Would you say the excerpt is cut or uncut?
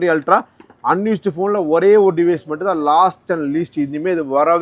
uncut